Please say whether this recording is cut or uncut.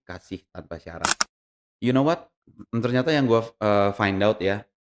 cut